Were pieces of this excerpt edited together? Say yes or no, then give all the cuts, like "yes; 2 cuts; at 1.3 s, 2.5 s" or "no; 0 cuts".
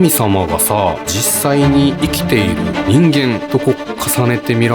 yes; 3 cuts; at 1.2 s, 2.8 s, 3.4 s